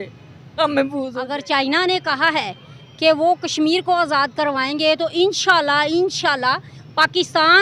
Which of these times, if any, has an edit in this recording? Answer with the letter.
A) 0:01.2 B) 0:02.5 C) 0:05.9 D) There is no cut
A